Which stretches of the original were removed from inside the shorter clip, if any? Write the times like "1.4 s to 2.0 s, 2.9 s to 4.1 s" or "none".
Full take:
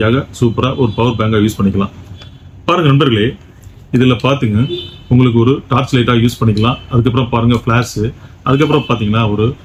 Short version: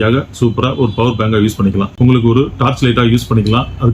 1.9 s to 5.0 s